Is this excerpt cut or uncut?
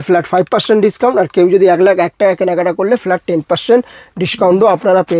uncut